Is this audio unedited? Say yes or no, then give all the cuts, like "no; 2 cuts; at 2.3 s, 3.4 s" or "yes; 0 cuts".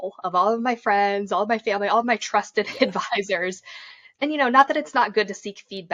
no; 1 cut; at 4.0 s